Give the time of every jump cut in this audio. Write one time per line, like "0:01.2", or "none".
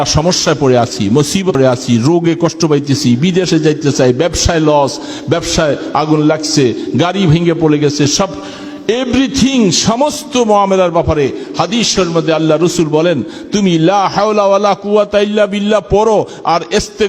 0:01.5